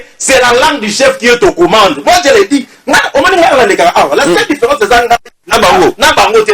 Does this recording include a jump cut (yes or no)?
no